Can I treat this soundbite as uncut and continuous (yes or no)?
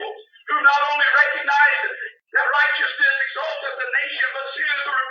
yes